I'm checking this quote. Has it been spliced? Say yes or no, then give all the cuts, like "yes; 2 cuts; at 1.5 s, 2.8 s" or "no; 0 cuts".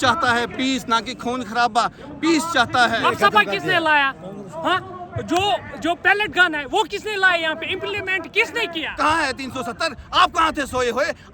yes; 2 cuts; at 3.0 s, 8.9 s